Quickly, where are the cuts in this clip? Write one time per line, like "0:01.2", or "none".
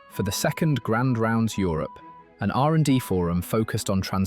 none